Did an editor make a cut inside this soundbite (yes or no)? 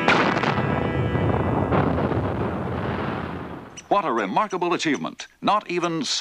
no